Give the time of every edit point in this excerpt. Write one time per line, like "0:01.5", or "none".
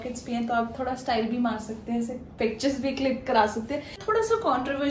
0:04.0